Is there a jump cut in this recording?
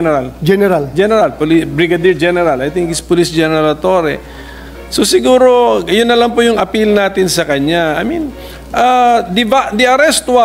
no; 0 cuts

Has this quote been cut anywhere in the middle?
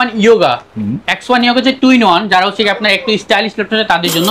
no; 0 cuts

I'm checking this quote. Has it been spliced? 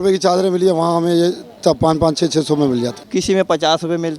yes; 1 cut; at 3.0 s

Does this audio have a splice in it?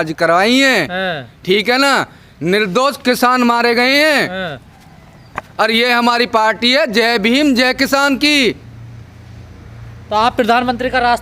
no; 0 cuts

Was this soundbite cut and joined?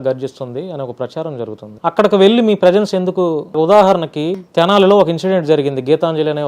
yes; 3 cuts; at 1.6 s, 3.5 s, 4.4 s

